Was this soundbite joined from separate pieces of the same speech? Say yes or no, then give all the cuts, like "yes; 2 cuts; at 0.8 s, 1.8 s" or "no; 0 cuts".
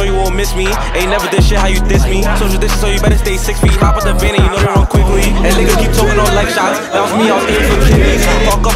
no; 0 cuts